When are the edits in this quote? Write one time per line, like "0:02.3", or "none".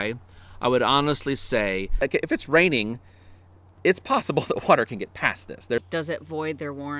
0:01.9
0:05.8